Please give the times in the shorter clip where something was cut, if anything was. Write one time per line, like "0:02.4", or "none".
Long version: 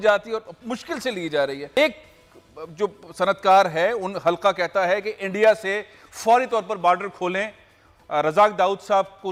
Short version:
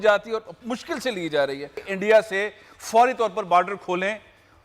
0:01.7